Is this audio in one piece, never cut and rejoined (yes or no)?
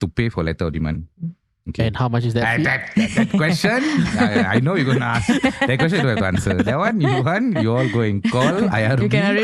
yes